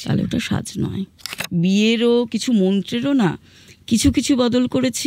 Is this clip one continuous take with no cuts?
no; 1 cut; at 1.4 s

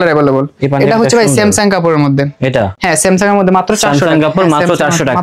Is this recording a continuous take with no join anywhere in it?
yes; 0 cuts

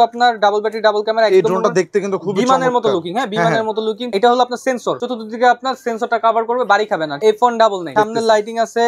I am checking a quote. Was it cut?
yes; 4 cuts; at 4.0 s, 5.0 s, 7.1 s, 7.9 s

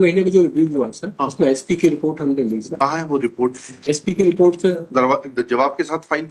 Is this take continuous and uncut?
yes; 0 cuts

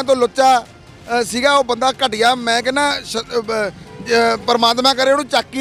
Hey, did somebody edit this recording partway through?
no; 0 cuts

